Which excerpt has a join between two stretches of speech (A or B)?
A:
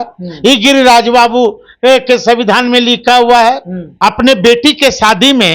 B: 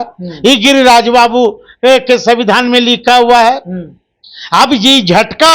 A